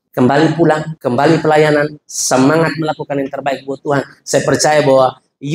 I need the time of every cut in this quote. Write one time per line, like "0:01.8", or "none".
0:00.9